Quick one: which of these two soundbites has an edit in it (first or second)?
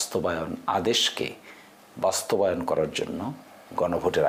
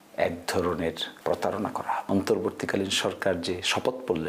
second